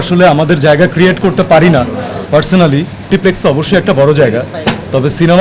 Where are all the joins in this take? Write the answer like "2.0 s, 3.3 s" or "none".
3.1 s